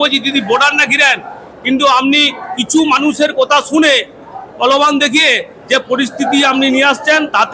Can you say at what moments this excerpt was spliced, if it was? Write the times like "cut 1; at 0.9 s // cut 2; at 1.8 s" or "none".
none